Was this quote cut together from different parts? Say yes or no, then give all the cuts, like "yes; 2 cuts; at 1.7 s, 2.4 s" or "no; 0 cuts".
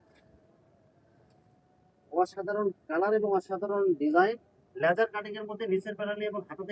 no; 0 cuts